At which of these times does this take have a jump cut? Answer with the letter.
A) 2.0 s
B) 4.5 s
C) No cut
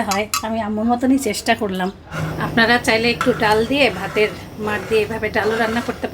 A